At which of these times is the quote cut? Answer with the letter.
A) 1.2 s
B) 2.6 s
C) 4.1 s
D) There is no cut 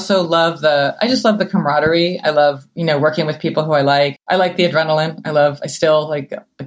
C